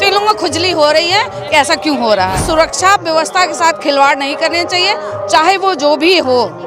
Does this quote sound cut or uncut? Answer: cut